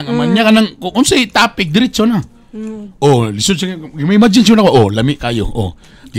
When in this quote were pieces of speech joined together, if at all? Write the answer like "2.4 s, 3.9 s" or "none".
none